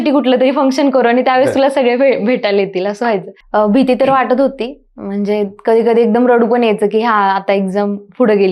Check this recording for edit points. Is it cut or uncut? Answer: cut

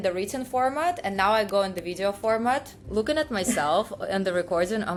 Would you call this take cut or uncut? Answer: uncut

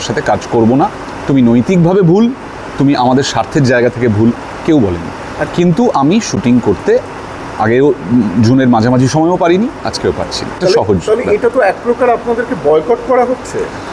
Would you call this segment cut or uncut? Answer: cut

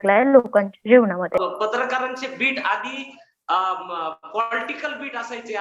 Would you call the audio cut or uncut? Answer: cut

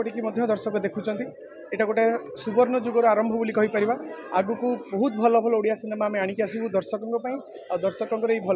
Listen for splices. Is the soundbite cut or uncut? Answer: uncut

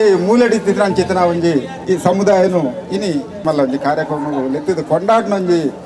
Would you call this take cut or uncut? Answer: cut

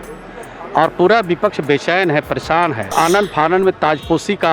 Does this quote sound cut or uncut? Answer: cut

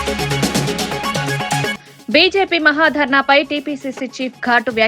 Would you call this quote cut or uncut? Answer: cut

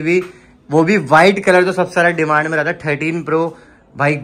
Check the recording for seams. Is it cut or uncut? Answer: uncut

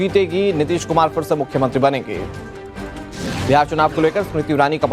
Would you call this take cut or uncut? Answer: uncut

